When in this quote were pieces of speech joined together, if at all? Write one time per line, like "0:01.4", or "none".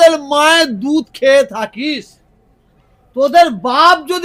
none